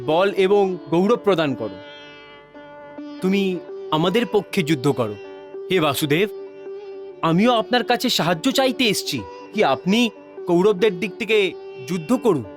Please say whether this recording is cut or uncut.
uncut